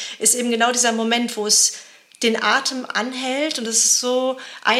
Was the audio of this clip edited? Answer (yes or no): no